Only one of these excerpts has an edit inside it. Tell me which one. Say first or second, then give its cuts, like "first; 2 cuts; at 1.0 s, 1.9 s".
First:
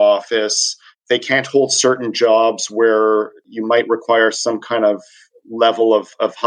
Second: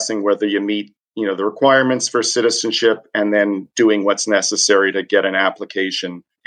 first; 2 cuts; at 0.9 s, 3.4 s